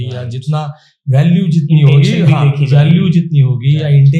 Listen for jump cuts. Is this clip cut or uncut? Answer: uncut